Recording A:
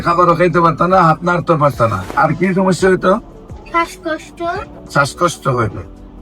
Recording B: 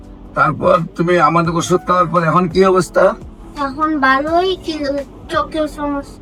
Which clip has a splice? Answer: A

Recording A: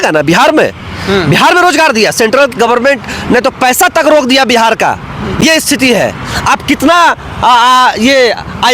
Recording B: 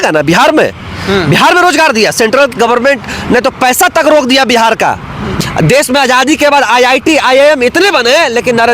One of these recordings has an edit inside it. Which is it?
B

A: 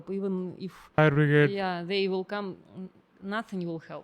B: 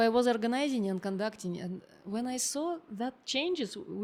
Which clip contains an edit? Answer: A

